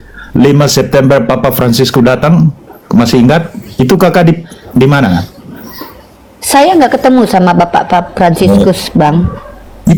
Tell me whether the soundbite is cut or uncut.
uncut